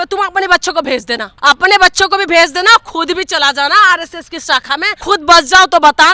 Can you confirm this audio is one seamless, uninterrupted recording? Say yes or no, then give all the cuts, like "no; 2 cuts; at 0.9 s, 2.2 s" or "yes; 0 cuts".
no; 2 cuts; at 1.2 s, 4.9 s